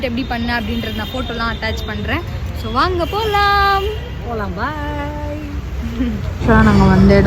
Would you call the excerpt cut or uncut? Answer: uncut